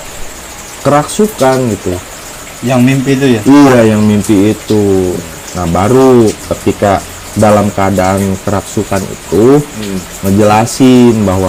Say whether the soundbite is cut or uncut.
uncut